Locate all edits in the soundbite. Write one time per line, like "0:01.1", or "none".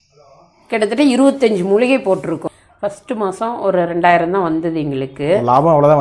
0:02.4